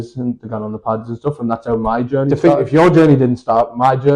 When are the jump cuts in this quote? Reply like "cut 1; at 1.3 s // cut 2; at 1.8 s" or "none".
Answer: cut 1; at 2.3 s